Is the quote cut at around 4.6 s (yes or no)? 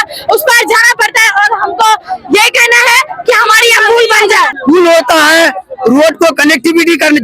yes